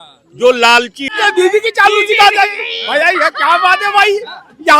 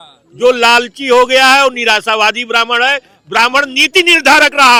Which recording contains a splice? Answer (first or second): first